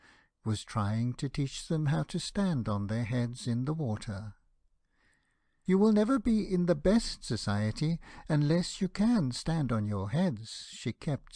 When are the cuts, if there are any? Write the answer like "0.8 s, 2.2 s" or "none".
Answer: 5.8 s